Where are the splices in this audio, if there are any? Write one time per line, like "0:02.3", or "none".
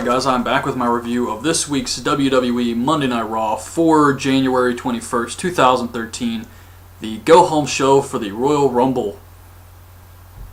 none